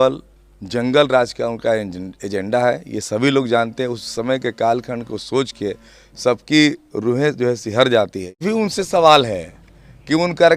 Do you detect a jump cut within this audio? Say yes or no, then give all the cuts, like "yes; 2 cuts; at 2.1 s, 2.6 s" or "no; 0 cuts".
yes; 1 cut; at 8.4 s